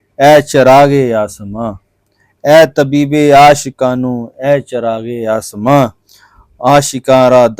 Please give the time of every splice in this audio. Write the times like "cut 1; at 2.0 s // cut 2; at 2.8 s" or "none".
none